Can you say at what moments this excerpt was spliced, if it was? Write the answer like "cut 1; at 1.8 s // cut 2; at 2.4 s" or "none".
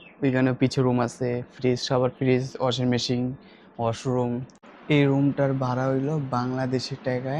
cut 1; at 4.7 s